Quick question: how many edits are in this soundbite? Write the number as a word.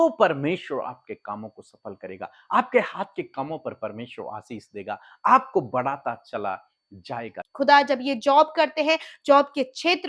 one